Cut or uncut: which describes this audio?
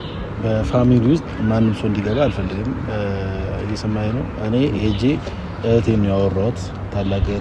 uncut